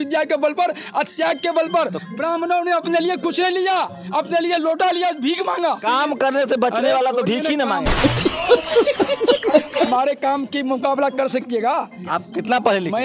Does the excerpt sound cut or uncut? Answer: cut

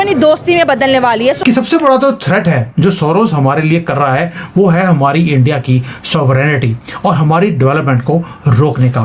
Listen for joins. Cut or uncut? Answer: cut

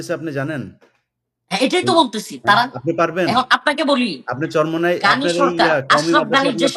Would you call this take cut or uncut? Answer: uncut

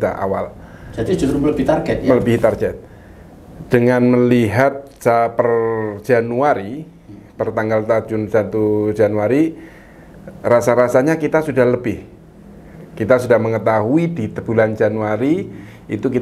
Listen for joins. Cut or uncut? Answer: uncut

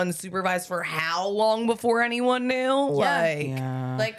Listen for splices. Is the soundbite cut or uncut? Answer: uncut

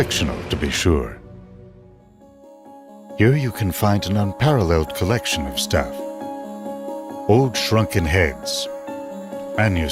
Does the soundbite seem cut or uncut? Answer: uncut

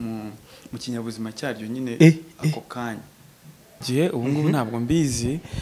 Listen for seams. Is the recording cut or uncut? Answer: cut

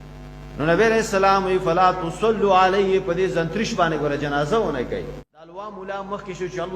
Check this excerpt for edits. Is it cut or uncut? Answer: cut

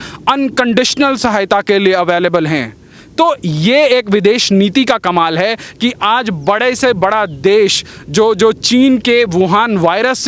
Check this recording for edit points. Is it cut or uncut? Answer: uncut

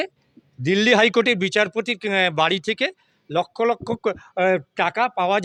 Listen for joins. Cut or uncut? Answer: uncut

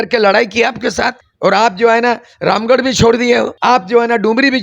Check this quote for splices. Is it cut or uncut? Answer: cut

